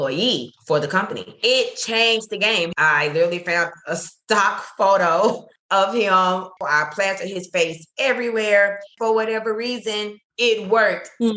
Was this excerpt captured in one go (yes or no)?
no